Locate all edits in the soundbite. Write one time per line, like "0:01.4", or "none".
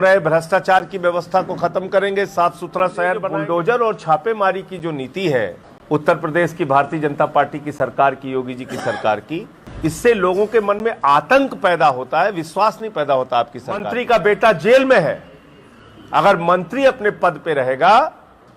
0:03.3
0:05.7
0:09.6
0:13.9